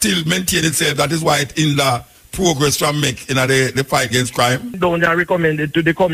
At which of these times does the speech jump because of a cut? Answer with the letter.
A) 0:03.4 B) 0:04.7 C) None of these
B